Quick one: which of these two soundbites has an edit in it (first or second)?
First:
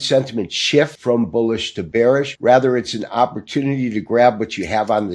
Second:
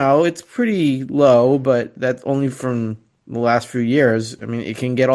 first